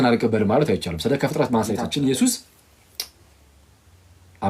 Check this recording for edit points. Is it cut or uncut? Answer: cut